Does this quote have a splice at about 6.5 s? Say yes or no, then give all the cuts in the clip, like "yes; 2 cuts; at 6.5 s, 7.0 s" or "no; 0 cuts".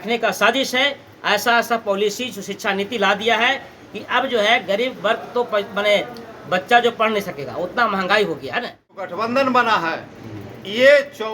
no; 1 cut; at 9.1 s